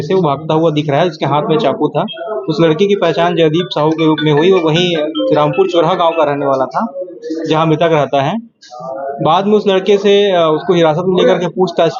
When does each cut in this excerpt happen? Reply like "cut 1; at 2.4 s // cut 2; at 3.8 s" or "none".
none